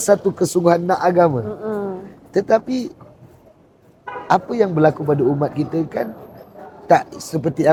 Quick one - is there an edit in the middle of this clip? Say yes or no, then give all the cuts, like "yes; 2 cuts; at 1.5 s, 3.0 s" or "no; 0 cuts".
no; 0 cuts